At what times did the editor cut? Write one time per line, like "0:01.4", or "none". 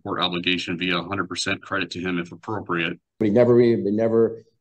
0:03.2

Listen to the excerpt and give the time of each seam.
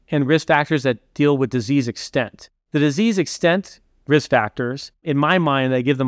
none

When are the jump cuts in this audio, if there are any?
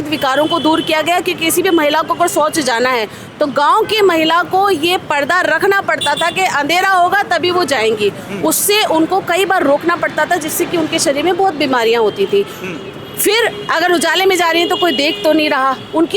none

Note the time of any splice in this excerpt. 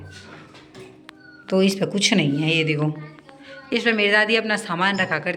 none

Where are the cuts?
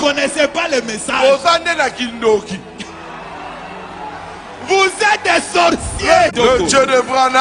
0:06.3

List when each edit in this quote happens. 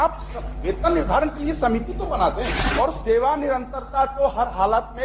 0:03.0

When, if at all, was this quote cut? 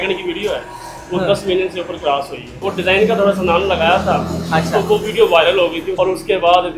0:02.6
0:05.9

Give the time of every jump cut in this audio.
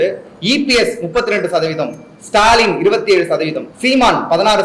0:03.7

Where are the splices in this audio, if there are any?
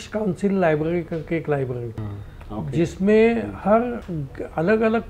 0:02.0

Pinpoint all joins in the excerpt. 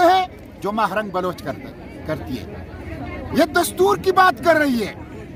none

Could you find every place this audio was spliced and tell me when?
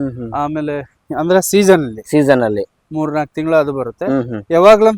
none

